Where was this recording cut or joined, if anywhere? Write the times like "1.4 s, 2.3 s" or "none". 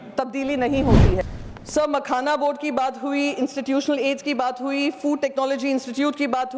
1.2 s